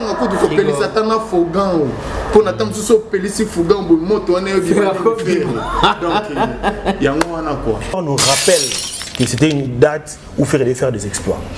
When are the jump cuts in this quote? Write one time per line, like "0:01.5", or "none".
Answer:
0:08.0